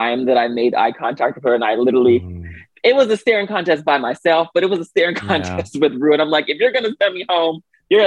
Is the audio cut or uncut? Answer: uncut